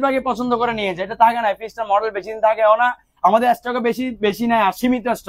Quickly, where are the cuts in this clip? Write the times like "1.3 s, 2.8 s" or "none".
none